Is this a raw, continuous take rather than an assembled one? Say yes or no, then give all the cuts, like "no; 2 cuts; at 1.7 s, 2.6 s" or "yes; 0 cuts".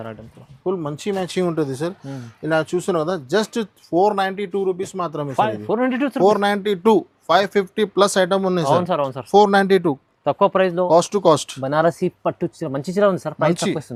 yes; 0 cuts